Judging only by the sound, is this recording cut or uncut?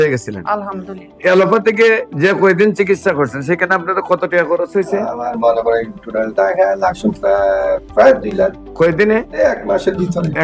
cut